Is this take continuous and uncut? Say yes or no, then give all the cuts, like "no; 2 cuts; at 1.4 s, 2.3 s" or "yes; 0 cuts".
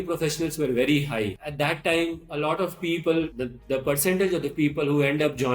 no; 2 cuts; at 1.4 s, 3.3 s